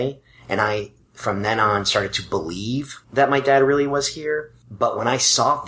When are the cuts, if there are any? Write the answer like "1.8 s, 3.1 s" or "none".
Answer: 3.0 s, 4.6 s